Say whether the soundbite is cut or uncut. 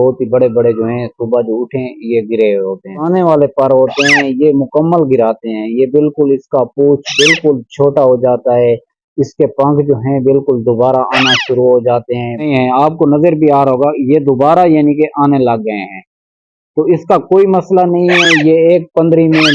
cut